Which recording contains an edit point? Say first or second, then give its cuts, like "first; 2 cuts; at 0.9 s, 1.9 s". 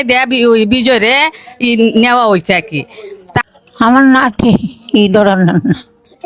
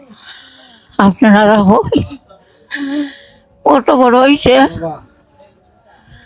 first; 1 cut; at 3.4 s